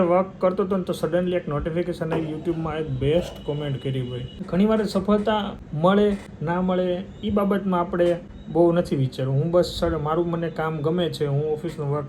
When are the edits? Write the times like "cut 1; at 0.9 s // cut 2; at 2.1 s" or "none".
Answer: cut 1; at 4.3 s // cut 2; at 5.6 s // cut 3; at 6.3 s // cut 4; at 8.4 s